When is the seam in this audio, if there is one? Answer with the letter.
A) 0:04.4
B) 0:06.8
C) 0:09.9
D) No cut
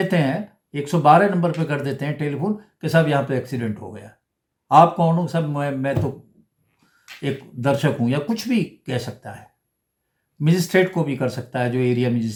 D